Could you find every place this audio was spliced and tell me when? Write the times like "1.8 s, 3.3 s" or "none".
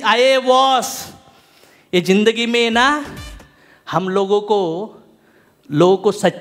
none